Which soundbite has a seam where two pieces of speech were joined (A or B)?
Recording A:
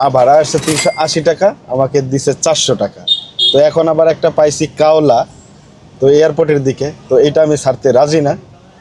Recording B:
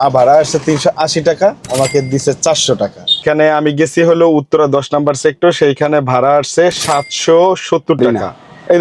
B